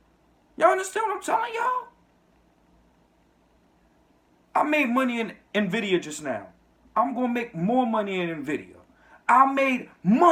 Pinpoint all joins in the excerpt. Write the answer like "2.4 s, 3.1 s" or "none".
none